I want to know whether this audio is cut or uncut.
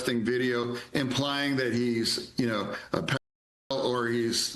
uncut